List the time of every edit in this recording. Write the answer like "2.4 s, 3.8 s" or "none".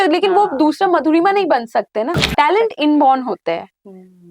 2.2 s